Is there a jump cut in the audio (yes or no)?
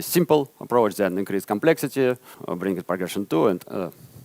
yes